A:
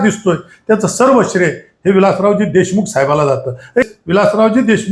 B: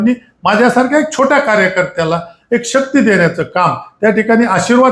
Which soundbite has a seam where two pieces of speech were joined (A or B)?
A